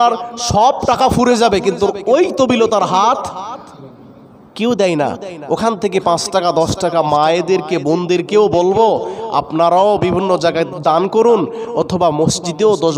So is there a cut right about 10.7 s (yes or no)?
yes